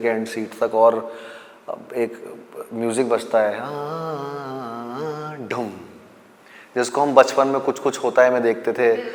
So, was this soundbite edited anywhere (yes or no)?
no